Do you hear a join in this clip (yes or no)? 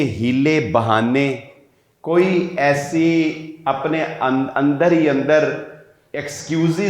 no